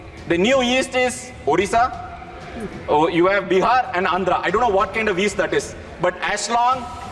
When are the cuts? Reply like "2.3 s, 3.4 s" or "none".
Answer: none